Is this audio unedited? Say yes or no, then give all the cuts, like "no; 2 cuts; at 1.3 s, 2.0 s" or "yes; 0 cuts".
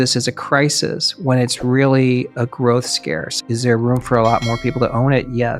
no; 1 cut; at 3.3 s